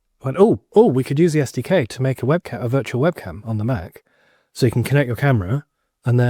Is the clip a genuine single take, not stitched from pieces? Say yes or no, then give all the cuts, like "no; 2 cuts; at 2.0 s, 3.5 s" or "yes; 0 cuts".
yes; 0 cuts